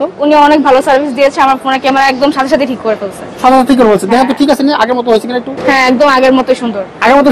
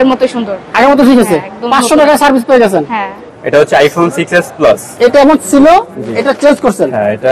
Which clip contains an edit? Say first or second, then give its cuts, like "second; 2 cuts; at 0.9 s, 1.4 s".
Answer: second; 2 cuts; at 3.3 s, 4.9 s